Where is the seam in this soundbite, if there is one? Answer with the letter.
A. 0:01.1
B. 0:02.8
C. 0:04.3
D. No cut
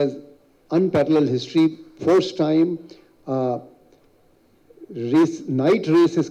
D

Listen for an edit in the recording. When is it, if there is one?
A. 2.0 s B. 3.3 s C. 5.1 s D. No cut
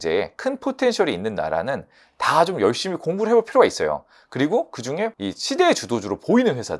C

